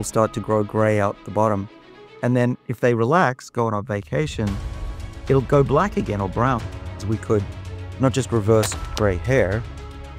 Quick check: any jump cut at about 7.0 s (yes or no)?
yes